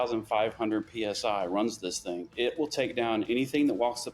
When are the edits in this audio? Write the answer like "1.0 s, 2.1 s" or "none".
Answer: 2.3 s